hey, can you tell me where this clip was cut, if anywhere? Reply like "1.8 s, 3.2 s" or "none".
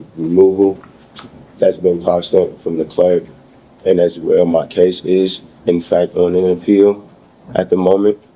none